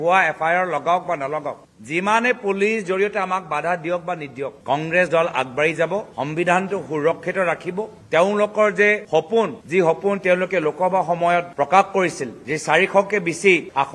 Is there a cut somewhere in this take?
no; 0 cuts

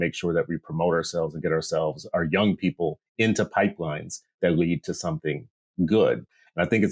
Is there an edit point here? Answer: no; 0 cuts

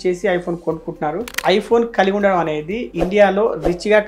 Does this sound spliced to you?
yes; 1 cut; at 1.4 s

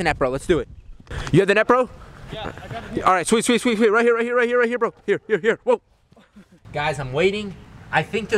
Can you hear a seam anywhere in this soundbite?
no; 0 cuts

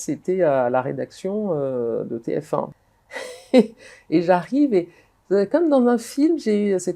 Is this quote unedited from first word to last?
no; 1 cut; at 2.8 s

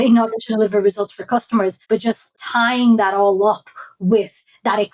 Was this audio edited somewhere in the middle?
yes; 1 cut; at 2.1 s

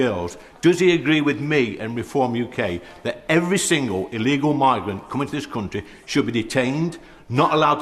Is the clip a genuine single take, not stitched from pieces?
yes; 0 cuts

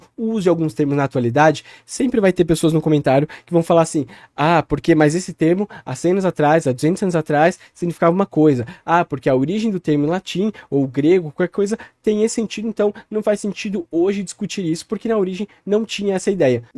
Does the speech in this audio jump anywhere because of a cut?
no; 0 cuts

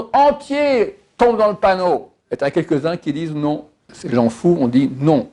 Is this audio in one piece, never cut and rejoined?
no; 2 cuts; at 2.1 s, 3.9 s

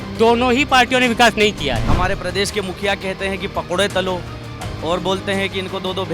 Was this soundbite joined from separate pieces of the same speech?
yes; 1 cut; at 1.9 s

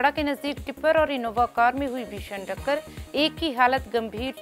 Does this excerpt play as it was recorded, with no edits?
yes; 0 cuts

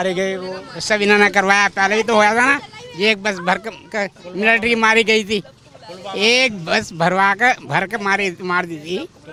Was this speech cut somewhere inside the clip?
no; 0 cuts

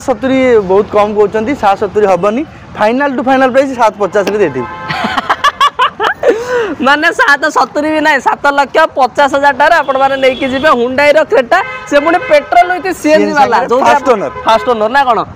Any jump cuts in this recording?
no; 0 cuts

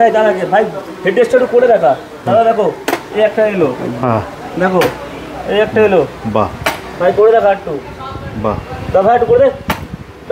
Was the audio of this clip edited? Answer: no; 0 cuts

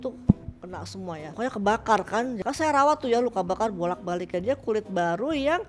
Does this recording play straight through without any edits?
no; 3 cuts; at 1.3 s, 2.4 s, 4.3 s

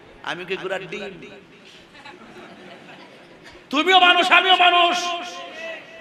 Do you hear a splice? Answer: no; 0 cuts

